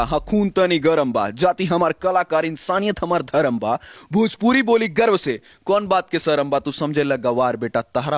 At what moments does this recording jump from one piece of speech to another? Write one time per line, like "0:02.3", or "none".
none